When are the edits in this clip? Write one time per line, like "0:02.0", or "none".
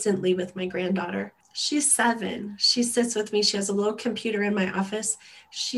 0:01.5

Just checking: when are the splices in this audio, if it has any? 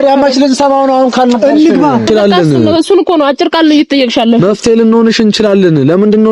0:02.1

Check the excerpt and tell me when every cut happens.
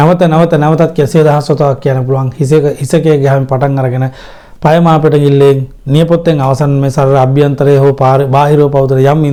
none

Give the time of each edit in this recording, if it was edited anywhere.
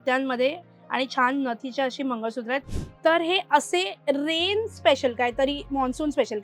0:02.6

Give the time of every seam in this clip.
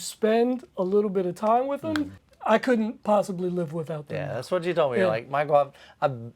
0:02.2

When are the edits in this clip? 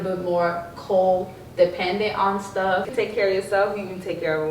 0:02.9

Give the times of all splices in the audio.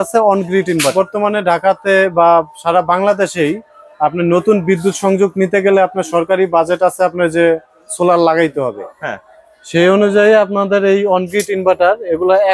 0:00.9

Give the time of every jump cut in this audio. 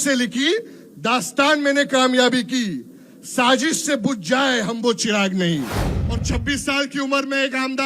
0:05.9

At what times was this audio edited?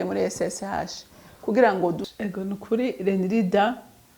0:02.1

